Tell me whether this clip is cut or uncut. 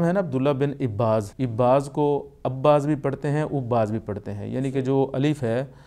cut